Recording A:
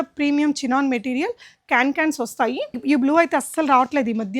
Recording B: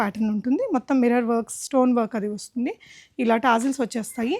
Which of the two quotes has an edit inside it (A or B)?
A